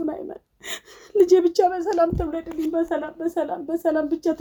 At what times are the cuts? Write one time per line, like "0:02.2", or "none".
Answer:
none

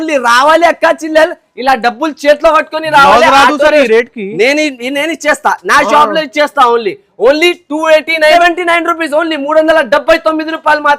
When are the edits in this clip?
0:08.3

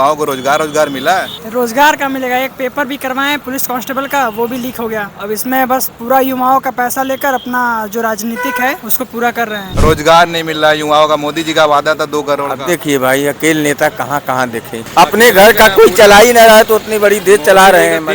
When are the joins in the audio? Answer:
0:01.4
0:03.4
0:05.1
0:08.9
0:09.6
0:14.8

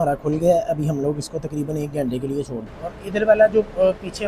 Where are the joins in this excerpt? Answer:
0:02.6

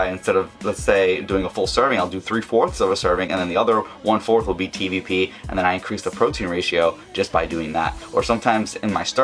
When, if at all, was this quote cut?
none

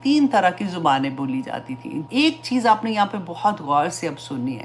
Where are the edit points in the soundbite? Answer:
0:02.0

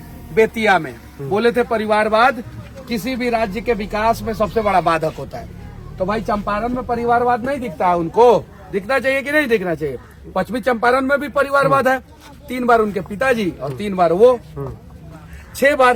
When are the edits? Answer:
none

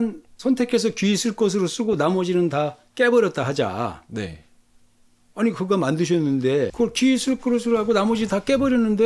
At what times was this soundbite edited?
0:06.7

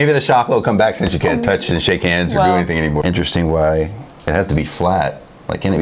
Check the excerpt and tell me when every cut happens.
0:03.0

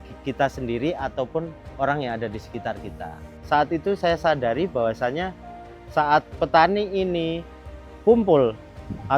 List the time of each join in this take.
0:03.3

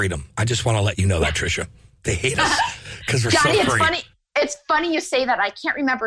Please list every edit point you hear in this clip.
none

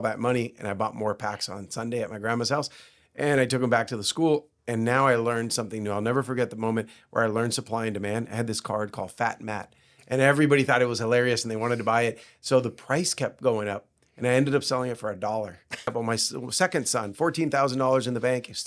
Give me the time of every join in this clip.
0:15.9

